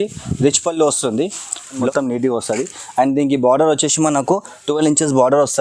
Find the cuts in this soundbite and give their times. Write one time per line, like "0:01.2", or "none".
0:01.9